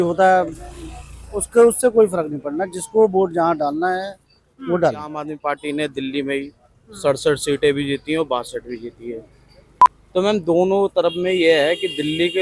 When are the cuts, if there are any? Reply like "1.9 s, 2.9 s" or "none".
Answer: 5.3 s